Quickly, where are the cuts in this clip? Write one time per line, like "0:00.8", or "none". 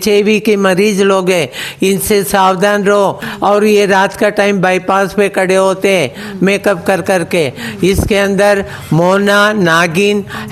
0:03.3